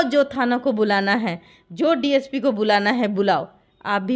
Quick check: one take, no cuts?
yes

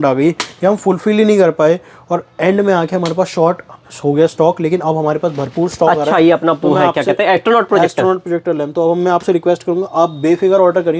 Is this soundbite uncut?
yes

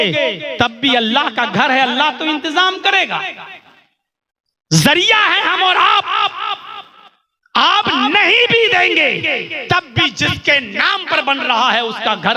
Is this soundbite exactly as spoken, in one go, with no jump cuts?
yes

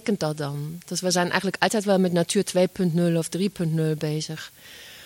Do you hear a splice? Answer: no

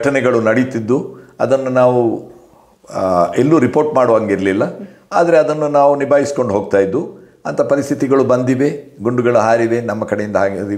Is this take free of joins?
yes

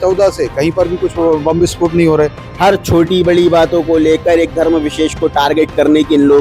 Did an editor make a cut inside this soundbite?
yes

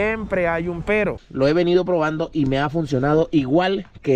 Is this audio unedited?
no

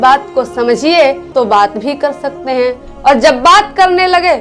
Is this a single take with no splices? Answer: no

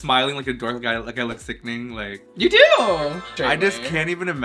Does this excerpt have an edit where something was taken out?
yes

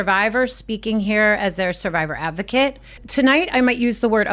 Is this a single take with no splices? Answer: no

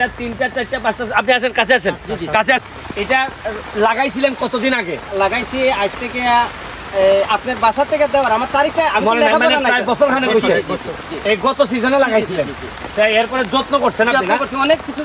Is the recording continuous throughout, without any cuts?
no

